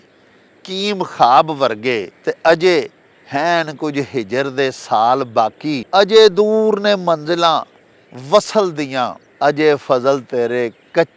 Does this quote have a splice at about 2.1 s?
yes; 3 cuts; at 2.1 s, 5.8 s, 9.2 s

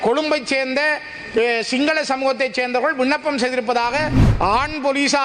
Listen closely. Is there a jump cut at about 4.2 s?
yes; 1 cut; at 4.2 s

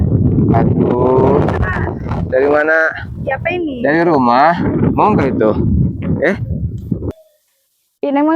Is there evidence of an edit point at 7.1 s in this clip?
yes; 1 cut; at 7.1 s

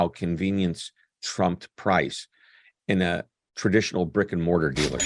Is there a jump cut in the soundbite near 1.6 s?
no; 0 cuts

